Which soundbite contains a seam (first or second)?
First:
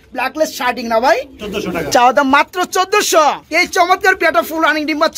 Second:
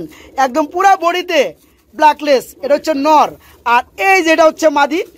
first